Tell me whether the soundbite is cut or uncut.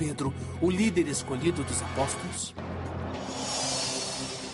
uncut